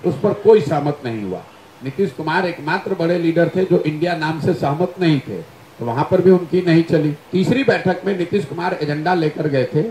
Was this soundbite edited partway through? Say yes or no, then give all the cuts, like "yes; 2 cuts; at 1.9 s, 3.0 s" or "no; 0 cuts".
yes; 1 cut; at 7.2 s